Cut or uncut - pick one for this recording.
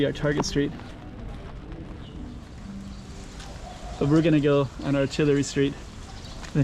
cut